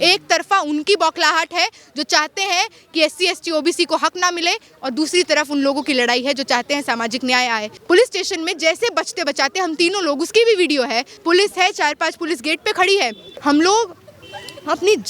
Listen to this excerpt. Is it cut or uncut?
cut